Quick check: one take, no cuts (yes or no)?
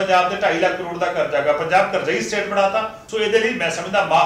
no